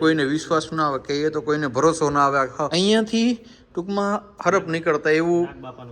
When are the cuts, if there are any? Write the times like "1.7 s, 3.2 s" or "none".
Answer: 2.7 s